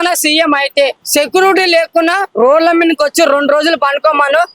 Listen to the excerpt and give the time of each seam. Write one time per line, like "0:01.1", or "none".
0:01.0